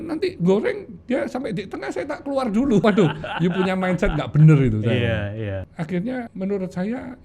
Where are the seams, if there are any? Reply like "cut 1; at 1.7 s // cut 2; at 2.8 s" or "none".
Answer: cut 1; at 2.8 s // cut 2; at 5.5 s // cut 3; at 6.3 s